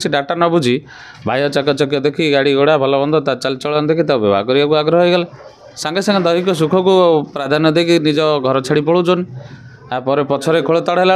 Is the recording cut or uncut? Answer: uncut